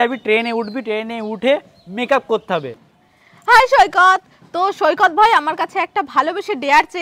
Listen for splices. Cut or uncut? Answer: cut